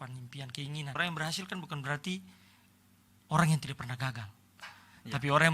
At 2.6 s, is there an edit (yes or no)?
no